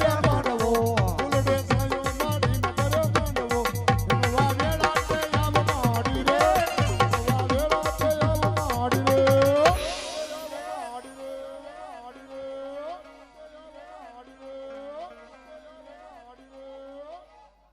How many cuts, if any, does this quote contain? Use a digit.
1